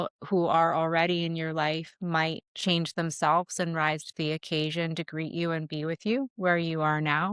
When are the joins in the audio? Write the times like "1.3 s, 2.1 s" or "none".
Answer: 2.5 s, 6.3 s